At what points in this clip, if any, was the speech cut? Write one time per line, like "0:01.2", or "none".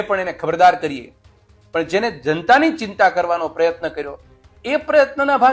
none